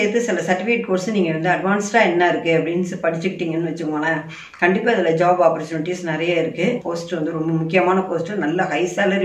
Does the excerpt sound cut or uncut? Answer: cut